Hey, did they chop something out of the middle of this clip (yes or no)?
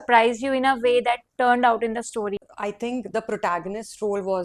yes